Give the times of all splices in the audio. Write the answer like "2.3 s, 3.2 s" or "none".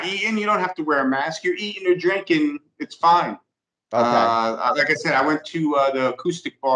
none

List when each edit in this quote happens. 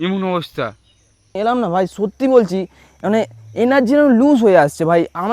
1.4 s

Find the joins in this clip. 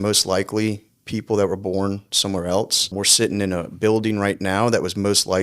2.9 s

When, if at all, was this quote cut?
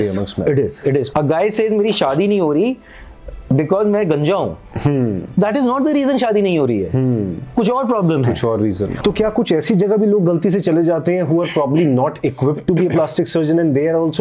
1.1 s, 8.9 s

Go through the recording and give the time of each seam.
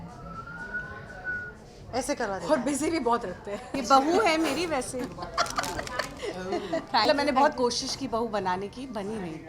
3.7 s, 6.1 s, 7.1 s

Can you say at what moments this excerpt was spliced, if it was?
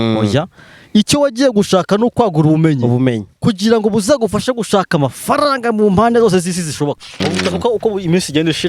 7.1 s

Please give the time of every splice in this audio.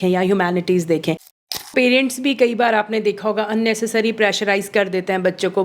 1.6 s

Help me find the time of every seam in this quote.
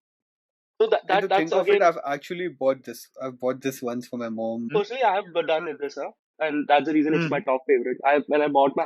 4.7 s

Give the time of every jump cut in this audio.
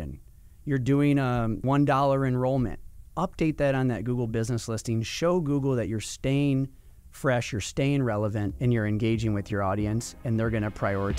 1.6 s, 8.5 s

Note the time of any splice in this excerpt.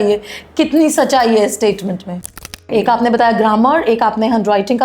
2.5 s

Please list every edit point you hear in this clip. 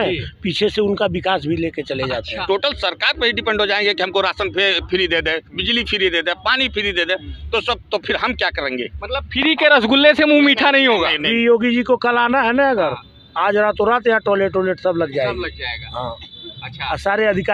2.4 s, 11.3 s

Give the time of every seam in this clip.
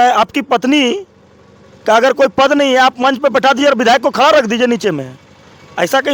none

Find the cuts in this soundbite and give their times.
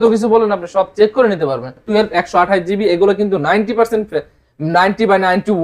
1.8 s

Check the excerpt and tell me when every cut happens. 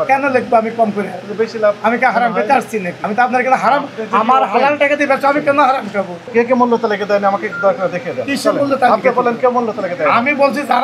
2.9 s, 6.2 s

